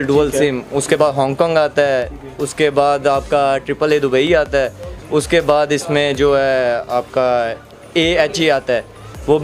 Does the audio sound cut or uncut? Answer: uncut